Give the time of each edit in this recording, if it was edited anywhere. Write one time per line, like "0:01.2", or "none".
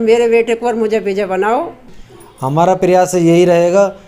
0:01.9